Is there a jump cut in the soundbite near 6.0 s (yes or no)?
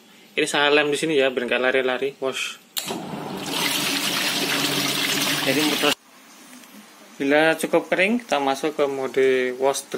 yes